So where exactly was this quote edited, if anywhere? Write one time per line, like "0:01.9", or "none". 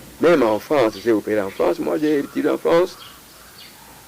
none